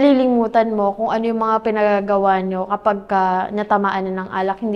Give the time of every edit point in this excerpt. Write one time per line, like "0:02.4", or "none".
none